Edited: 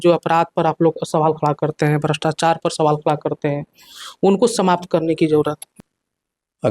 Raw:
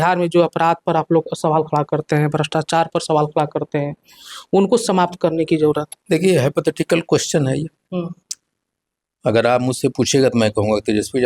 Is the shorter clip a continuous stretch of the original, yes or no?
no